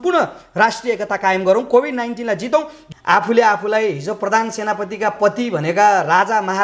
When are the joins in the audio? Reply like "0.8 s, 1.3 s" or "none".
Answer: 2.8 s